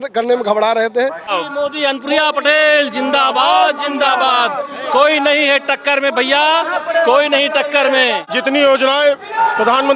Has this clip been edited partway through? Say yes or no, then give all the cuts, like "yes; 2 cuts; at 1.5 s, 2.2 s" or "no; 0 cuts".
yes; 2 cuts; at 1.3 s, 8.3 s